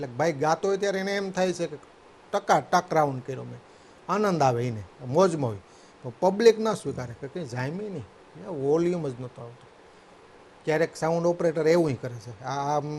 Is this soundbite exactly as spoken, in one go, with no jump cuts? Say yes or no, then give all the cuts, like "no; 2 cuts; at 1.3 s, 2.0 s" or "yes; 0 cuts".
yes; 0 cuts